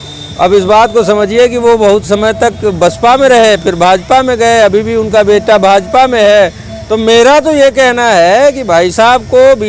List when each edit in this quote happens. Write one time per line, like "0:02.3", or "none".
none